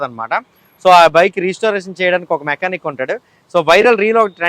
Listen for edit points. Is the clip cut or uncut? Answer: uncut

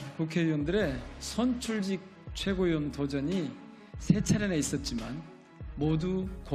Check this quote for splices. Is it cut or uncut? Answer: uncut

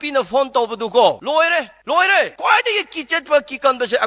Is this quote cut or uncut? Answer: cut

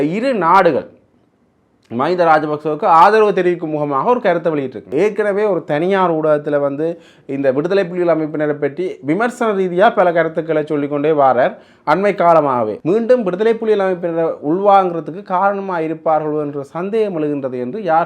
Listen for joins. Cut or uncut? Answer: cut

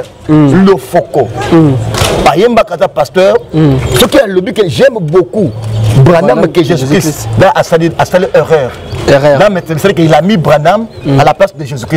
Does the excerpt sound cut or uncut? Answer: uncut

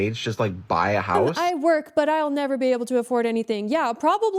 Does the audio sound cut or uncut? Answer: cut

